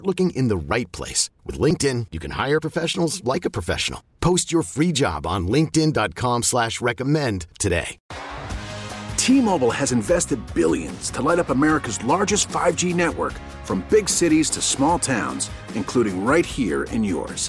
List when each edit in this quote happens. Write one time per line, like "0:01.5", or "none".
0:08.0